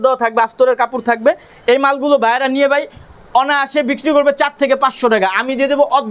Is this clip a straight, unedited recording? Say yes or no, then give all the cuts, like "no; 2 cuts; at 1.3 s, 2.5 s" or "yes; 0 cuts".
yes; 0 cuts